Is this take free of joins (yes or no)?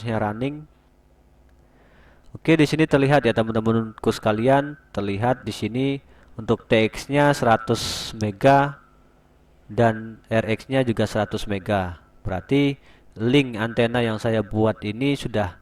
yes